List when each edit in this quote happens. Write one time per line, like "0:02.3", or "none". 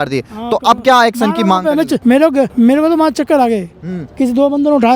0:02.2

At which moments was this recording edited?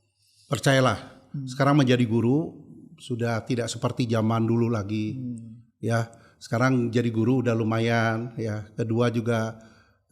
none

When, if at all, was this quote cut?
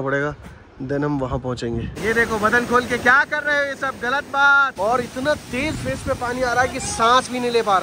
0:01.9
0:04.7

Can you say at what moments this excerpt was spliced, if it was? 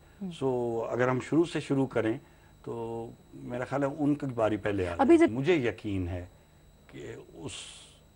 0:05.3

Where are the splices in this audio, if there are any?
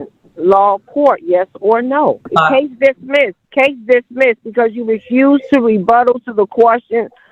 0:02.2
0:03.4

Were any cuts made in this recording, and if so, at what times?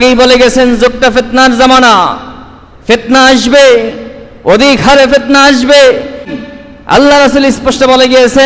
0:06.3

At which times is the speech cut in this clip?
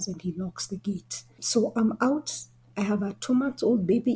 none

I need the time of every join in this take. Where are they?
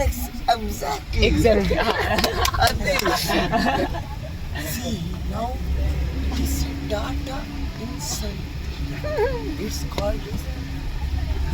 none

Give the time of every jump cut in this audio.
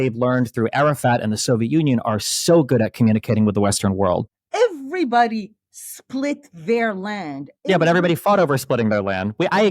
0:04.4

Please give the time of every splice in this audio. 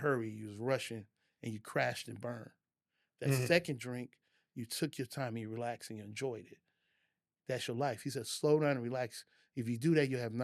none

